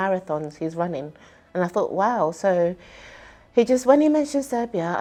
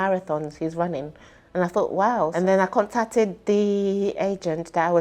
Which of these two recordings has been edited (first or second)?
second